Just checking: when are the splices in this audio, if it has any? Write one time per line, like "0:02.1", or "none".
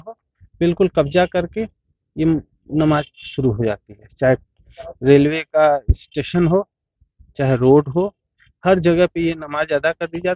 none